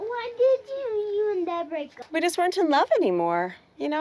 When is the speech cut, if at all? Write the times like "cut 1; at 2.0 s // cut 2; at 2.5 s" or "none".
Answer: cut 1; at 2.0 s